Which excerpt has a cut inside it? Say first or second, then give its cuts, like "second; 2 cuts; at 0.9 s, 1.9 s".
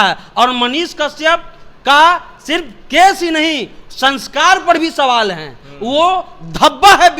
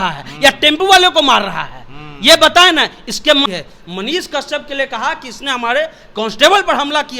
second; 1 cut; at 3.5 s